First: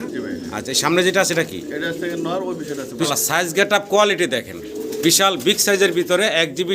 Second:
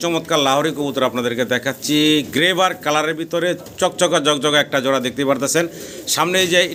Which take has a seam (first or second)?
first